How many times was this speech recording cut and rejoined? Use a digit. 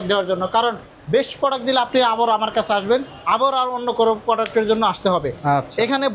0